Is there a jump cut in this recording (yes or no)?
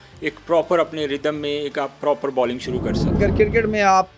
yes